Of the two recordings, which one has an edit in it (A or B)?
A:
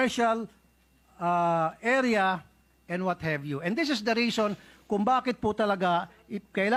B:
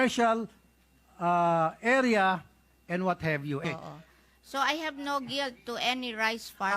B